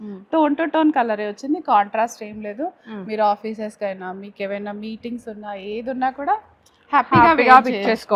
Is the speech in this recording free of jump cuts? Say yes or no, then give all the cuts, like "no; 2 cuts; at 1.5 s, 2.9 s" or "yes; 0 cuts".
yes; 0 cuts